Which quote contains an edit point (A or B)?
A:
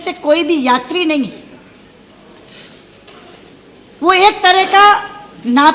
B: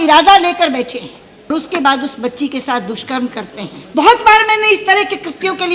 B